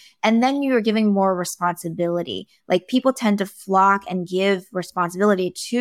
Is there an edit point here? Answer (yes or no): no